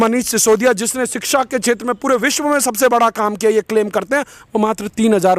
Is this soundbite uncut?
yes; 0 cuts

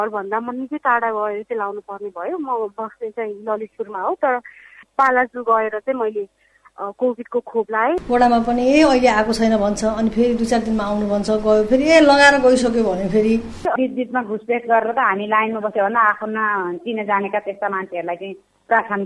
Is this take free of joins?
no; 3 cuts; at 4.7 s, 8.0 s, 13.7 s

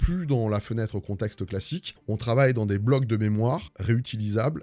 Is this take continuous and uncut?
yes; 0 cuts

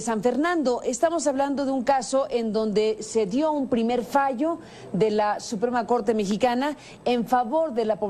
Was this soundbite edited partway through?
no; 0 cuts

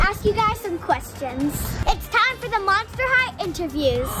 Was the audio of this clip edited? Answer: no; 0 cuts

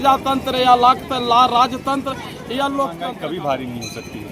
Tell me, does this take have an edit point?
yes; 1 cut; at 3.0 s

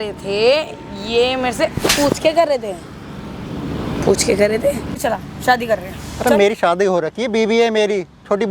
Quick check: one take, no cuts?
no; 1 cut; at 5.0 s

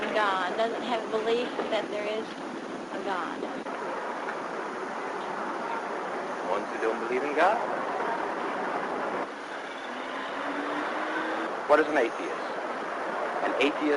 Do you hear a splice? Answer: yes; 1 cut; at 10.4 s

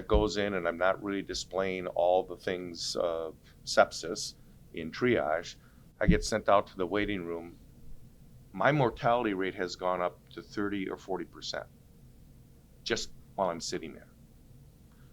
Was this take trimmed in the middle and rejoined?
no; 0 cuts

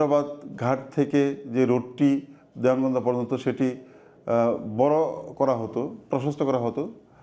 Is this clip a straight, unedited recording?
yes; 0 cuts

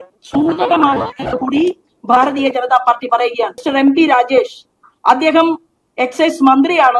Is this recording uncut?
no; 1 cut; at 3.6 s

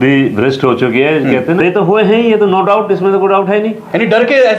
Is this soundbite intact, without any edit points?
no; 1 cut; at 1.6 s

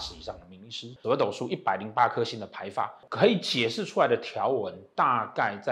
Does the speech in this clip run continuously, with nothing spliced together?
no; 2 cuts; at 0.9 s, 3.0 s

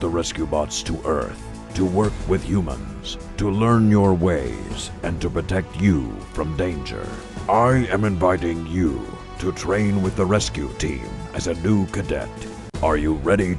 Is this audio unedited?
yes; 0 cuts

